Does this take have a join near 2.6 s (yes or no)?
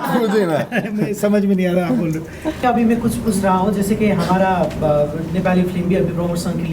yes